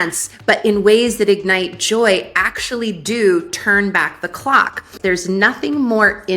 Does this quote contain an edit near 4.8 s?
yes; 1 cut; at 4.8 s

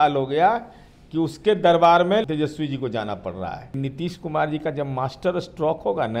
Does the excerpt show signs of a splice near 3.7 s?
yes; 2 cuts; at 2.2 s, 3.7 s

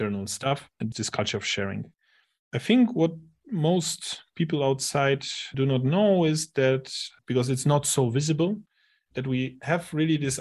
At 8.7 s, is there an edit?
no; 0 cuts

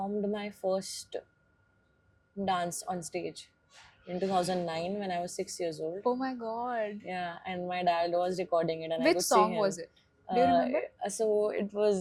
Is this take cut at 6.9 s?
no; 0 cuts

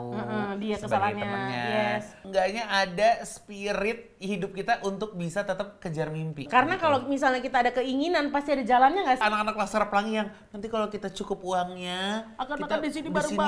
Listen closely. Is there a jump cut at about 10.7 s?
no; 3 cuts; at 2.2 s, 6.5 s, 9.2 s

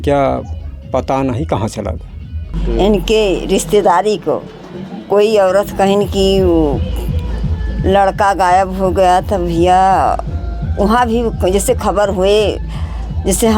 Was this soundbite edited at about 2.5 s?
yes; 1 cut; at 2.5 s

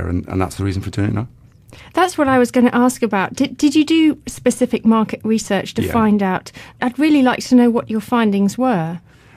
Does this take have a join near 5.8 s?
no; 1 cut; at 3.9 s

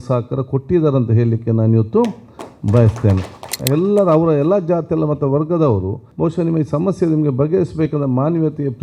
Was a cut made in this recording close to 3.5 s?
yes; 1 cut; at 3.5 s

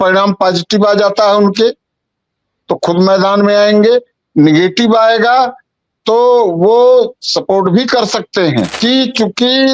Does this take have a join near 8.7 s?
yes; 1 cut; at 8.7 s

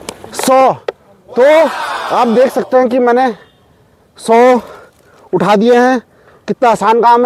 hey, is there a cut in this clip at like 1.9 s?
no; 0 cuts

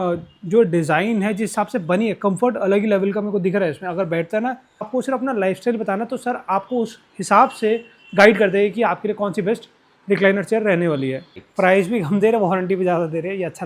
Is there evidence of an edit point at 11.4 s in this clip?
yes; 2 cuts; at 4.9 s, 11.4 s

